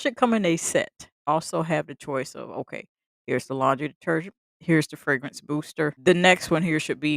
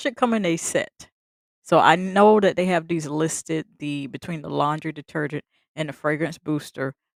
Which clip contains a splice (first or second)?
first